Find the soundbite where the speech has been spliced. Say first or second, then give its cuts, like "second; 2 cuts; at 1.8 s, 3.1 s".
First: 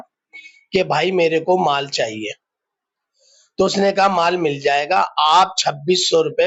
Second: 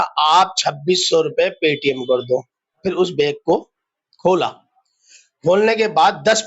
second; 1 cut; at 2.8 s